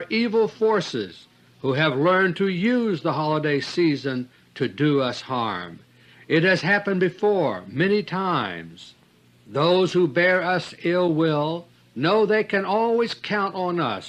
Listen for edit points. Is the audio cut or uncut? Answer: uncut